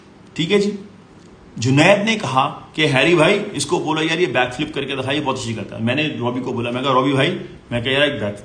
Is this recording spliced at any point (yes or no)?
no